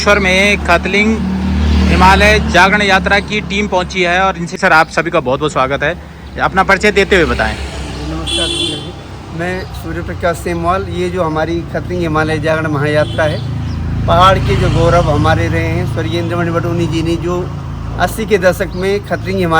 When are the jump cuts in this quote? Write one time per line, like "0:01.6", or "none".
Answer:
0:04.6